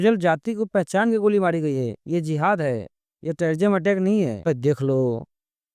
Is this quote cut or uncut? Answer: cut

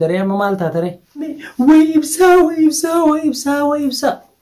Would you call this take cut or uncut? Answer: cut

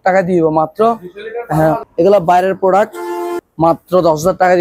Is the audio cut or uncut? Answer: cut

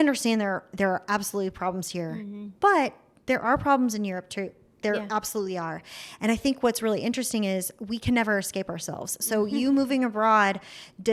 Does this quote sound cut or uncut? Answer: uncut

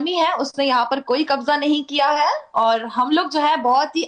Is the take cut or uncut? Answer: uncut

